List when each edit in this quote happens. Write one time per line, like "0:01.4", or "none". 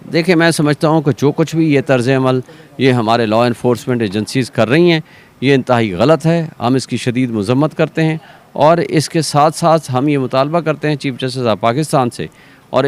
none